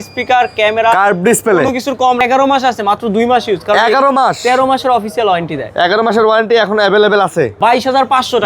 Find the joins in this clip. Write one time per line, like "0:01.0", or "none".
0:02.2
0:07.5